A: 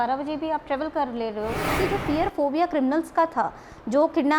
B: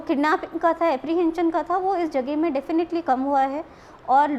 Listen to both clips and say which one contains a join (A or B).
A